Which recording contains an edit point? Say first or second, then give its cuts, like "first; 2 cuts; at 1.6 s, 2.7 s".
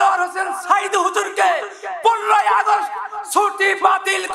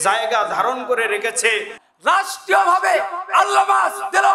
second; 1 cut; at 1.8 s